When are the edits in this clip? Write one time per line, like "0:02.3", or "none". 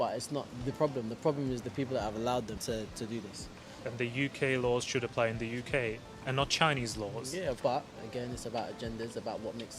0:02.6
0:03.6
0:07.6